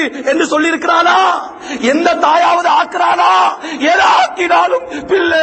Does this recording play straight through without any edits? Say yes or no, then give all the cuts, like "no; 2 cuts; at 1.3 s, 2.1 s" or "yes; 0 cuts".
yes; 0 cuts